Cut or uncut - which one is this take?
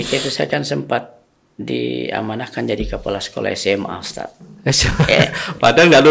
uncut